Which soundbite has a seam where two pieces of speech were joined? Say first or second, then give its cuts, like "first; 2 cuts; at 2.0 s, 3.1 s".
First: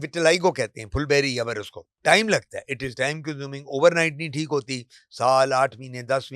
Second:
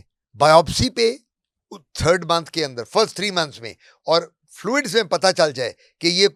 first; 1 cut; at 1.8 s